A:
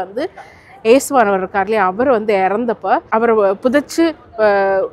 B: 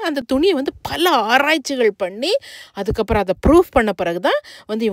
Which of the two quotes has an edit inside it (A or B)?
A